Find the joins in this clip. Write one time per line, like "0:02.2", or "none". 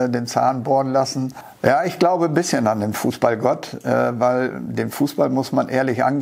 0:01.4